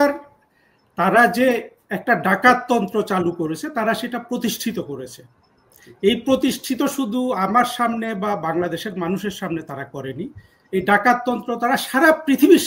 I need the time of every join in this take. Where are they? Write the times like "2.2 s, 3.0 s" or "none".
none